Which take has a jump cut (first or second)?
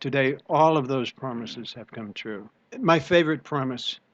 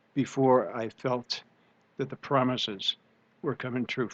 first